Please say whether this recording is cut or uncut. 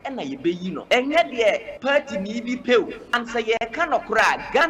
cut